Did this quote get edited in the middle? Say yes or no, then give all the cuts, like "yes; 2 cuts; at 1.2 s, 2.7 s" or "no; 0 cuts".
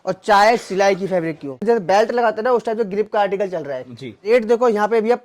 yes; 2 cuts; at 1.6 s, 4.3 s